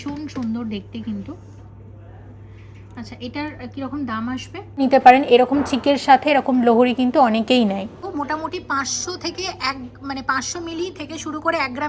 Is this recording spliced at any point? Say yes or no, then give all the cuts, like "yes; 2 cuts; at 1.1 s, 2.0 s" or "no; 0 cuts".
yes; 2 cuts; at 4.8 s, 8.1 s